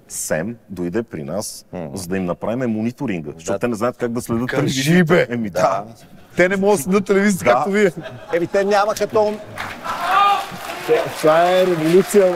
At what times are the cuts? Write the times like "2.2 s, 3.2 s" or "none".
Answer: none